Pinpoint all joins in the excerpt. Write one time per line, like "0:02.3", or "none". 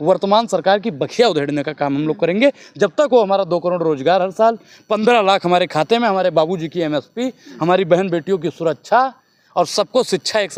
none